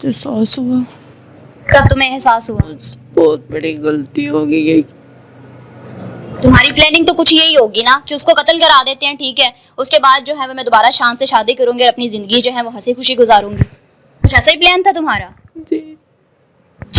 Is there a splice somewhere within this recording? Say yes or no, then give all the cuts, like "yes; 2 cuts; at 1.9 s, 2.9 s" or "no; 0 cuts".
no; 0 cuts